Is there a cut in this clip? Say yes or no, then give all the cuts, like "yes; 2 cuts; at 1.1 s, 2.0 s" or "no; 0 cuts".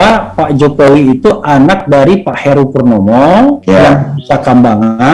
no; 0 cuts